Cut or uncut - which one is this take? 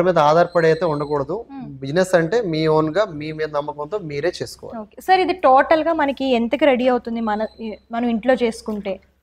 uncut